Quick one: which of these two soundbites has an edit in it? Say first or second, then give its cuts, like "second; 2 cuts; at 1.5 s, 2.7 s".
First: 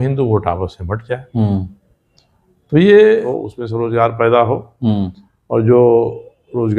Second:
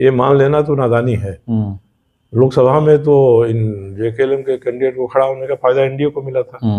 first; 1 cut; at 3.4 s